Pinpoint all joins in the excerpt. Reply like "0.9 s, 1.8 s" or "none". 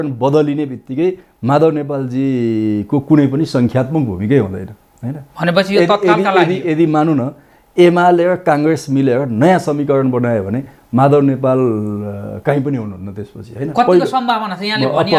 none